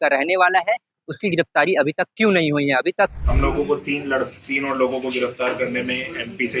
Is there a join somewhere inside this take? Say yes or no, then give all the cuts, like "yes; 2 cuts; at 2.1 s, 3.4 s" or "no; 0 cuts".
yes; 1 cut; at 3.2 s